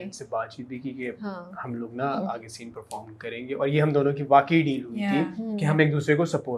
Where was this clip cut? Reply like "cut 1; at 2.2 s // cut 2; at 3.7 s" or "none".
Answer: none